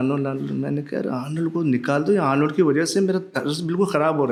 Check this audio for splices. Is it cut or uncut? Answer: uncut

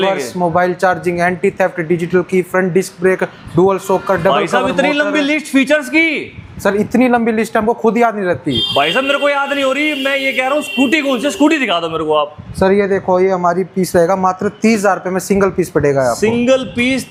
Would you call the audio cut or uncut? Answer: uncut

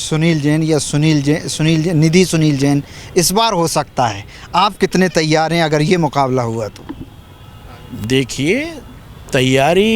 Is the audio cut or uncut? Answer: uncut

